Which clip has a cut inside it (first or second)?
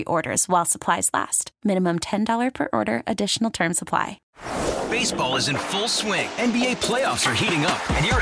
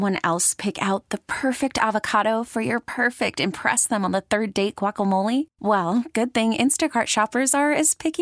first